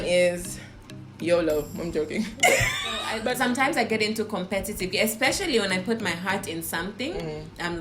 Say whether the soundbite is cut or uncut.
cut